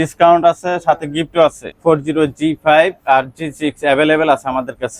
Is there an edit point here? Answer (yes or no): yes